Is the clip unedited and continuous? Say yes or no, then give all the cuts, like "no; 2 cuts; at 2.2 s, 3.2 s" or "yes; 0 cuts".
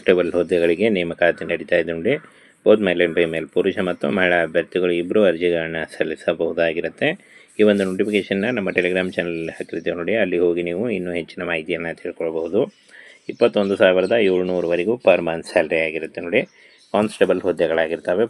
yes; 0 cuts